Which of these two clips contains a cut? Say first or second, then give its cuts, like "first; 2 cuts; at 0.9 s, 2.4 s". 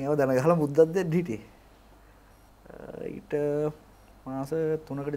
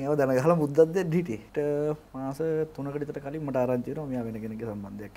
second; 2 cuts; at 1.5 s, 2.1 s